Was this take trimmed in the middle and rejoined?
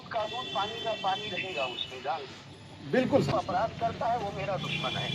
yes; 1 cut; at 3.3 s

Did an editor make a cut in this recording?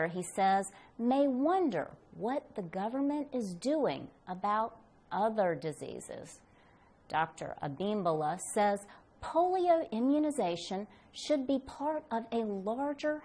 yes; 1 cut; at 10.6 s

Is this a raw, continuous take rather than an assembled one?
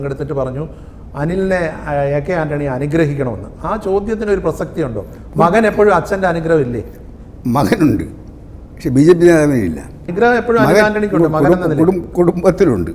no; 1 cut; at 10.0 s

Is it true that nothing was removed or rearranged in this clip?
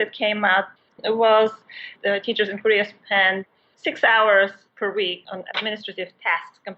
no; 2 cuts; at 0.9 s, 5.2 s

